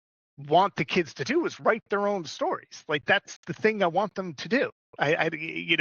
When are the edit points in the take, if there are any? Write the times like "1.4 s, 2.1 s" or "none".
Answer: none